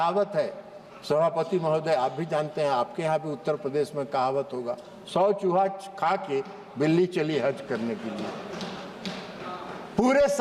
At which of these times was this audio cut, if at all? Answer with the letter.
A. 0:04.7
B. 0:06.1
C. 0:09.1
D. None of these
D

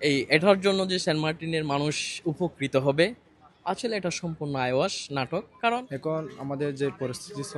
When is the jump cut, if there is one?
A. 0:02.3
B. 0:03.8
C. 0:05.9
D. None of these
C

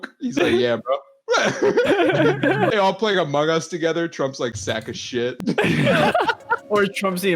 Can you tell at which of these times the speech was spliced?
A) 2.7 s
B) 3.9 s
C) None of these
A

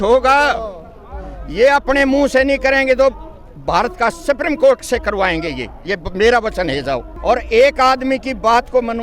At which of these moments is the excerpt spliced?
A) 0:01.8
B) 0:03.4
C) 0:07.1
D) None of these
C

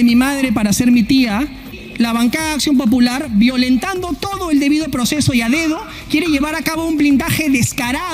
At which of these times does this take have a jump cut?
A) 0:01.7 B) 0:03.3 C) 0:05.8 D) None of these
A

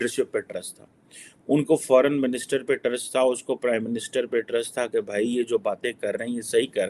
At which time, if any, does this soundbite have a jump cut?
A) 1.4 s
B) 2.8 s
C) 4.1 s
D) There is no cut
D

